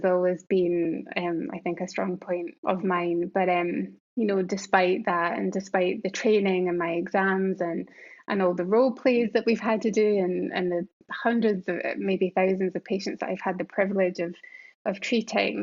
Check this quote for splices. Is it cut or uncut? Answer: cut